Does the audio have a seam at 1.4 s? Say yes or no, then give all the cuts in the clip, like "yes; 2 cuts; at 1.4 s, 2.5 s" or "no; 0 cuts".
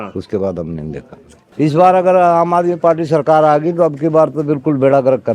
yes; 1 cut; at 1.4 s